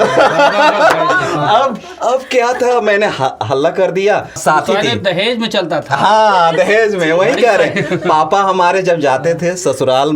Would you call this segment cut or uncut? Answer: cut